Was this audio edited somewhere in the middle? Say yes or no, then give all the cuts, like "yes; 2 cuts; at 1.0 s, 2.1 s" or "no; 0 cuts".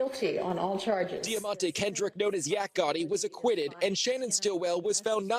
yes; 1 cut; at 1.3 s